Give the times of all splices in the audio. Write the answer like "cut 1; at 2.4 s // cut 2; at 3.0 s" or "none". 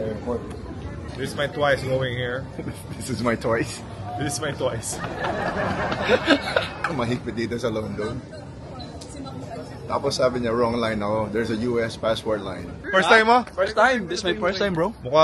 cut 1; at 1.0 s // cut 2; at 6.8 s // cut 3; at 12.9 s